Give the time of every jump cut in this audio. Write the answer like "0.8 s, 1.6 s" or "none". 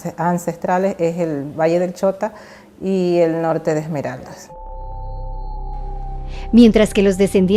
1.1 s